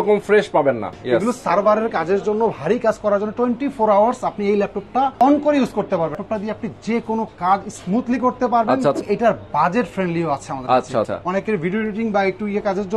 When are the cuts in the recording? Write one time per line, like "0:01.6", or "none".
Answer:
0:00.9
0:05.1
0:06.1
0:09.0
0:11.1